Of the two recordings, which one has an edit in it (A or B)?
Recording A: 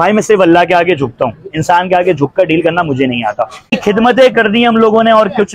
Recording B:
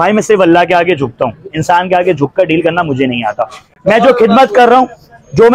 A